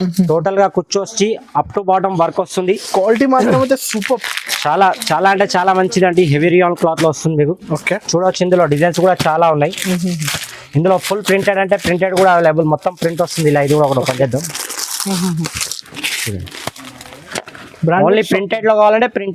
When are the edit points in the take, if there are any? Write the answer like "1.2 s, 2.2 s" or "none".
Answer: none